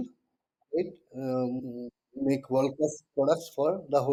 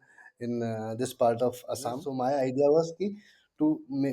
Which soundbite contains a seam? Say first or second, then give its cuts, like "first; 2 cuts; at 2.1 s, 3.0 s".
second; 1 cut; at 2.1 s